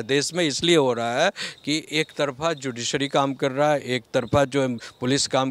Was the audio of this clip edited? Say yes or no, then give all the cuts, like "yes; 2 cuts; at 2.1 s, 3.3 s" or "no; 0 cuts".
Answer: no; 0 cuts